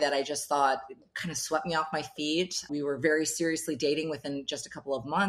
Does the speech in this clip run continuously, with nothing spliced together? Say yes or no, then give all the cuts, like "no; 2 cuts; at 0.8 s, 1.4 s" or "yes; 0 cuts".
yes; 0 cuts